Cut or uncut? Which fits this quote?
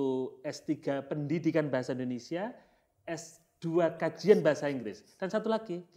uncut